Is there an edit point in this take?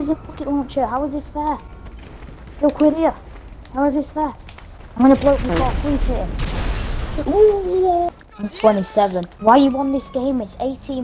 yes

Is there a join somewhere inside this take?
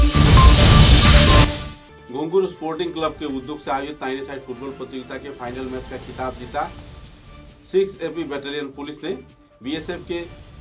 no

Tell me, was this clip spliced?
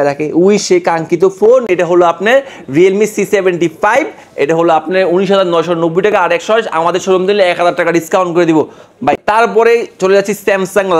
no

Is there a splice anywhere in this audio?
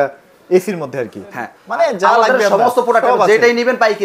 yes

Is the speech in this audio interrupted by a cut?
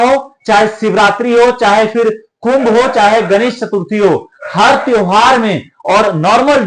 no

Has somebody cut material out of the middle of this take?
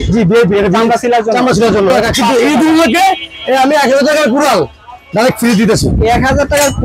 yes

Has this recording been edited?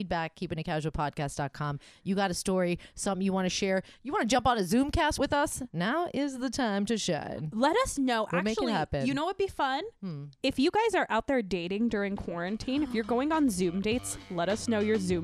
no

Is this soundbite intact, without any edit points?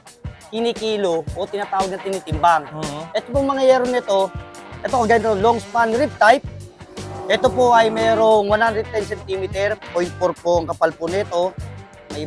yes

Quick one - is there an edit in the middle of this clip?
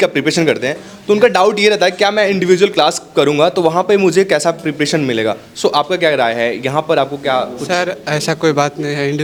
no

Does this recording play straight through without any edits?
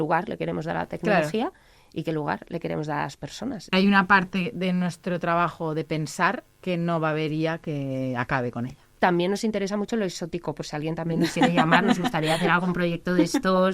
no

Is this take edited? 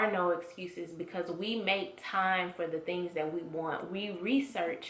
no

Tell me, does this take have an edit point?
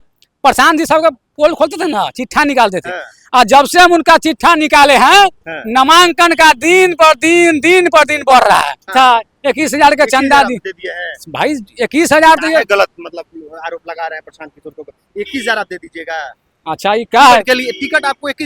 yes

